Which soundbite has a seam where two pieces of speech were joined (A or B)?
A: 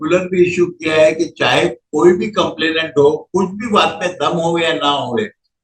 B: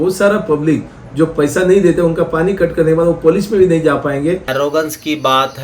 B